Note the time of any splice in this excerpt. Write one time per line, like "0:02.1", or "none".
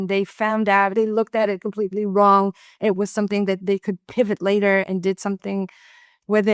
0:00.9
0:03.6
0:04.9